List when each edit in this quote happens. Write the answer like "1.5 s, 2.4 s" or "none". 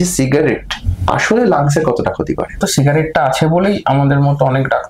2.6 s

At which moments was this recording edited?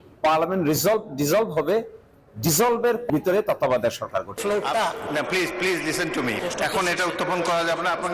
4.4 s

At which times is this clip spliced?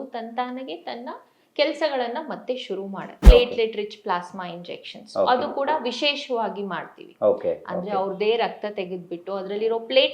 3.1 s

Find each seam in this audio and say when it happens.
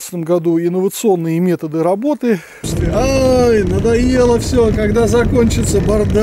2.7 s

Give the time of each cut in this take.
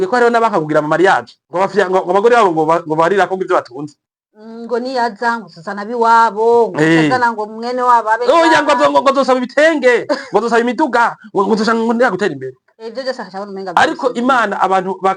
1.4 s

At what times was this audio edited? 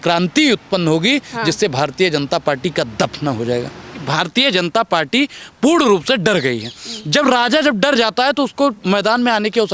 4.0 s

